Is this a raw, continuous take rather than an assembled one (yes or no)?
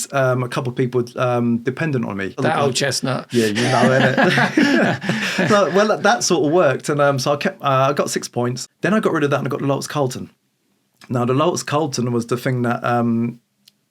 no